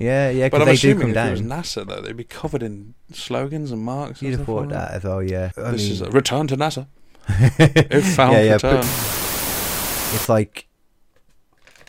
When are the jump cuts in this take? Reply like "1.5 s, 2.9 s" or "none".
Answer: 5.5 s, 9.5 s